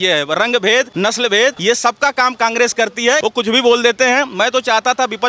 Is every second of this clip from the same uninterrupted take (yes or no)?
no